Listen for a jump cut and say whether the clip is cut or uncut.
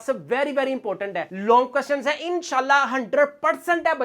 cut